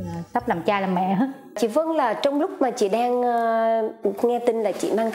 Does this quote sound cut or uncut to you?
uncut